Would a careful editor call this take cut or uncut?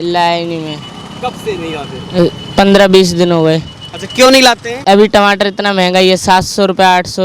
cut